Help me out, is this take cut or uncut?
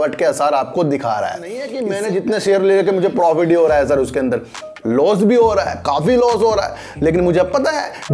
cut